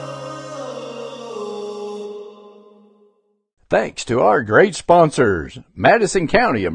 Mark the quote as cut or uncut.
cut